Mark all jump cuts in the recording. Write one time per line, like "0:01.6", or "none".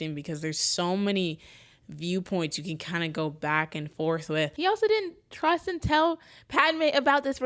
0:04.5